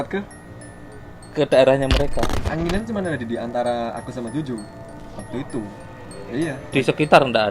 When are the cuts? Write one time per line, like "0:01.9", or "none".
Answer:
0:02.4